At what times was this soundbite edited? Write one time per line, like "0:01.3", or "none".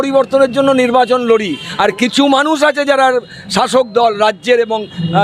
0:01.6